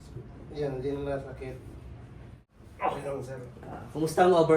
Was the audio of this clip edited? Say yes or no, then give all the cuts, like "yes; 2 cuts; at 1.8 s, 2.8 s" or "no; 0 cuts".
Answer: yes; 1 cut; at 2.5 s